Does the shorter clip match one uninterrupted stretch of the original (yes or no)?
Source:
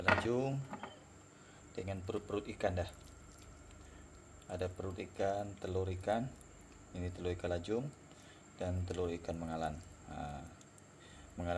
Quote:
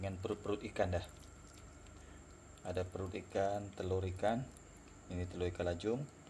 yes